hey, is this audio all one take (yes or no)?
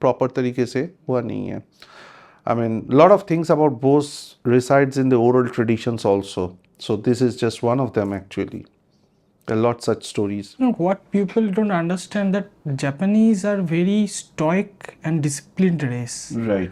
yes